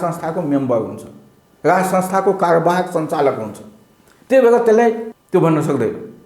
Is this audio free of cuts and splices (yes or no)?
no